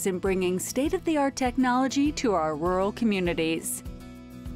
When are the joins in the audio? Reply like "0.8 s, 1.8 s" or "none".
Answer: 3.6 s